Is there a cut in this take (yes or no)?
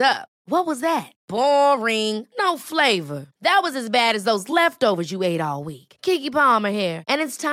no